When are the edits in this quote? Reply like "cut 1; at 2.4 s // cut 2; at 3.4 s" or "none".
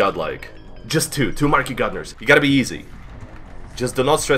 cut 1; at 2.1 s